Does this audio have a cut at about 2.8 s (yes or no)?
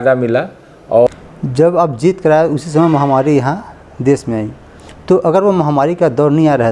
no